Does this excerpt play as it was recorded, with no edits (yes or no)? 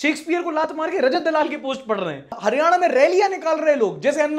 yes